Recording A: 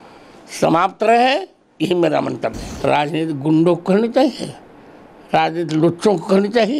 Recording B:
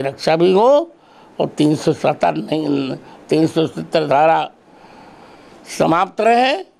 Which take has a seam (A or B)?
A